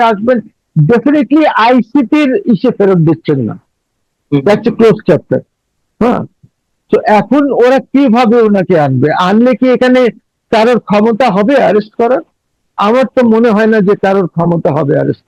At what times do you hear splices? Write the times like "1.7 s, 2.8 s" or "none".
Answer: none